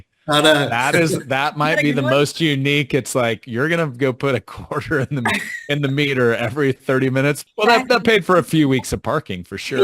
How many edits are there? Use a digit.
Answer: 1